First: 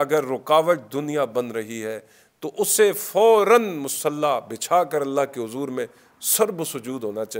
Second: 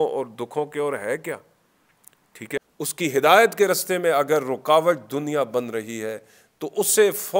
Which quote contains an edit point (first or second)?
second